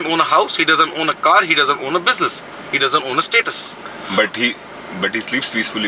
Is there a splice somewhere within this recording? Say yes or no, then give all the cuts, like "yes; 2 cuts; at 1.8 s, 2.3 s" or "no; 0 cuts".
no; 0 cuts